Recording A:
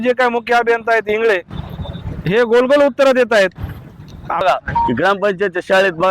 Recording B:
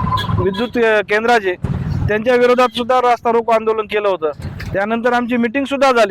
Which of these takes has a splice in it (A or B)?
A